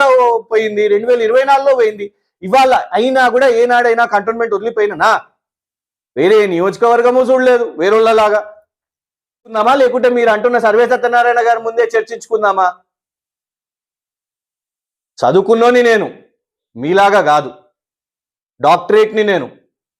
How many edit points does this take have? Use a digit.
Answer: 1